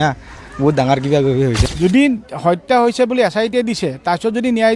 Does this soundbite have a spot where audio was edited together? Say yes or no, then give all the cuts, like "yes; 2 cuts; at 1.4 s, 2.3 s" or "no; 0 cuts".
yes; 1 cut; at 1.6 s